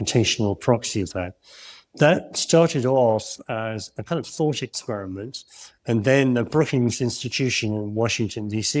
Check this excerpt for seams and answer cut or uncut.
uncut